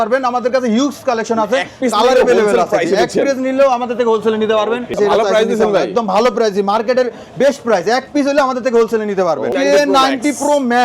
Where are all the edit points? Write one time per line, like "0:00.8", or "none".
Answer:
0:04.9
0:09.5